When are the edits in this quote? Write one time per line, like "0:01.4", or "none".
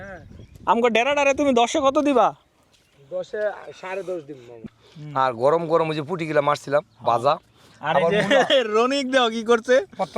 0:04.7

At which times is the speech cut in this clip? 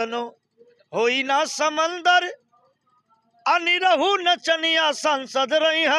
none

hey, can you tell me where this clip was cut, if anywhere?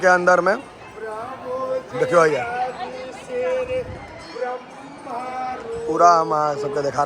none

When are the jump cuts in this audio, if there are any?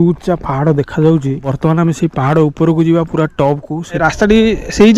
0:01.5
0:04.0

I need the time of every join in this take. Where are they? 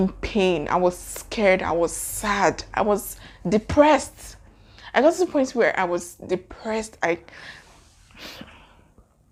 none

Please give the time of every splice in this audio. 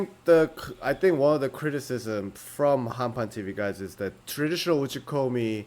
0:04.2

